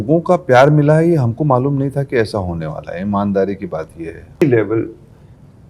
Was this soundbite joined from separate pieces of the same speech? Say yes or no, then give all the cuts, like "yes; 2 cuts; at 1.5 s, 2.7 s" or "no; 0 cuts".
yes; 1 cut; at 4.4 s